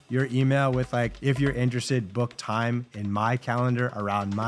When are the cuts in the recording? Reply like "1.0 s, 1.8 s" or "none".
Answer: 1.1 s